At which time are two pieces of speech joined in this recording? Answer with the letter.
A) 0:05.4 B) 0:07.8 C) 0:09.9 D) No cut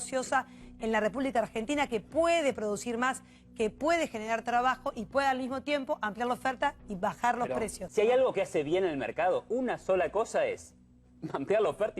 B